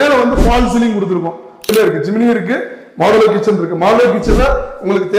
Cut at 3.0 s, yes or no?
no